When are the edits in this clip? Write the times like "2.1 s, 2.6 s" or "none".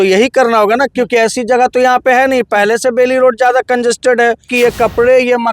4.5 s